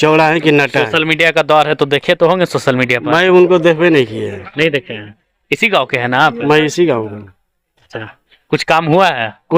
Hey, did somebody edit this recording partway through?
no; 0 cuts

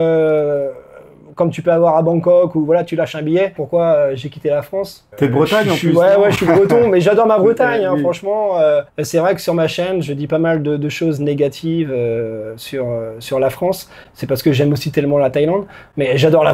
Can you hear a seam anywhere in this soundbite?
yes; 3 cuts; at 3.6 s, 5.0 s, 9.0 s

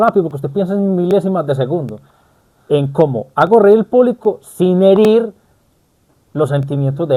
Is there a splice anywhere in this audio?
no; 0 cuts

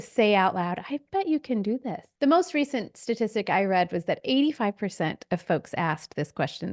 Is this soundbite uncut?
no; 1 cut; at 2.0 s

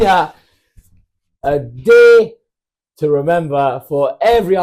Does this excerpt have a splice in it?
no; 0 cuts

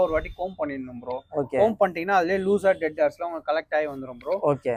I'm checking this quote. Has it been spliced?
no; 0 cuts

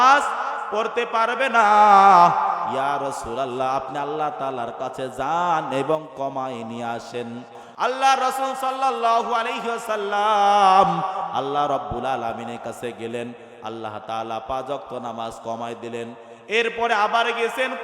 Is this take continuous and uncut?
no; 1 cut; at 7.8 s

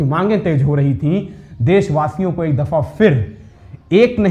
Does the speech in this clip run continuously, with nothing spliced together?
yes; 0 cuts

